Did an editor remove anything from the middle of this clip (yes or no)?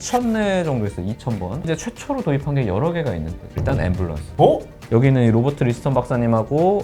yes